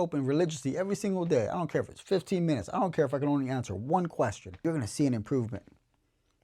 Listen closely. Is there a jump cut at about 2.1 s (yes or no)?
no